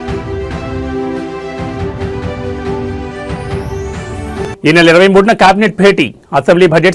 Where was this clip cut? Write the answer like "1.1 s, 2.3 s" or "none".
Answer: 4.0 s